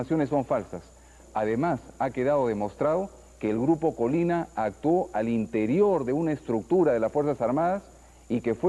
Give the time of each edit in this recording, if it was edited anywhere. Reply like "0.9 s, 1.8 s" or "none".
5.5 s